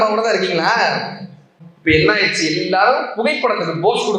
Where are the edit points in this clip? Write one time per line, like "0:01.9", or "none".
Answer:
0:01.5